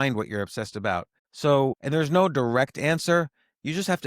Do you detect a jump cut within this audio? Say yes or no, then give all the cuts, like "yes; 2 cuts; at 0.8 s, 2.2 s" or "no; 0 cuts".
yes; 2 cuts; at 1.2 s, 1.8 s